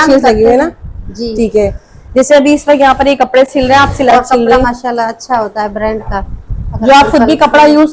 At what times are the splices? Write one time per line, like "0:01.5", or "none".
0:04.1

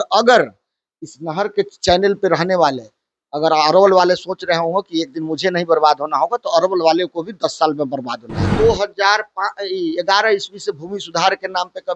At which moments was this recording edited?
0:08.5

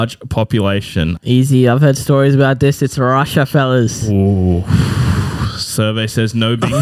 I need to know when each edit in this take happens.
0:01.2

